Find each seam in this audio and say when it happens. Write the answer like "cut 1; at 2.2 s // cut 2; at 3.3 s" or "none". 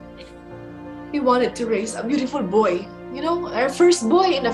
none